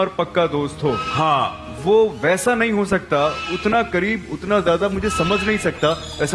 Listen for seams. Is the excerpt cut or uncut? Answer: uncut